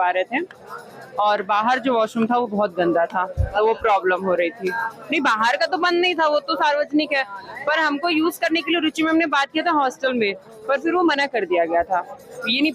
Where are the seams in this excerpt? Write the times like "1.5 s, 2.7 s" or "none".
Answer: none